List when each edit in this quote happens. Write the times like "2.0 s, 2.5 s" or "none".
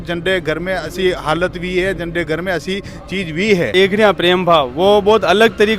3.7 s